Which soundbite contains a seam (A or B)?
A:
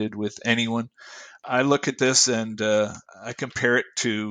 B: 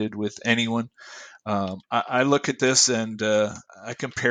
A